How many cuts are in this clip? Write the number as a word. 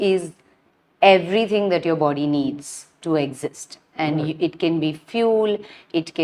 zero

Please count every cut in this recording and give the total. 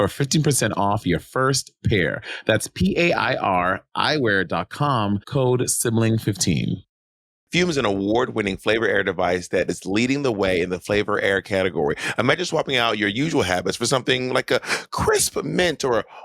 one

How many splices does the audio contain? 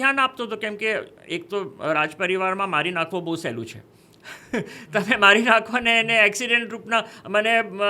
zero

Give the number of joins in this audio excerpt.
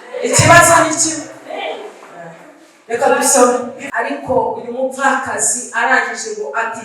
one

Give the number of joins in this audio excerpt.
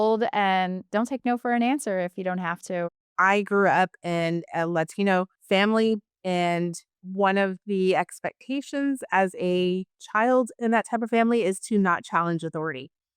one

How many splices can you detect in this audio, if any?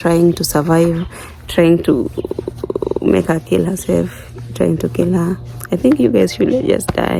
zero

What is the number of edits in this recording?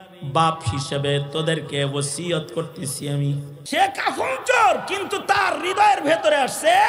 one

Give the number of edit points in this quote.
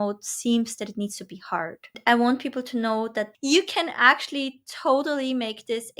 two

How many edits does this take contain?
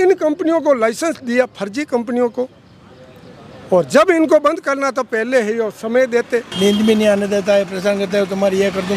one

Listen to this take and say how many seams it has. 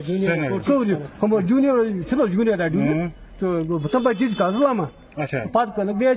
zero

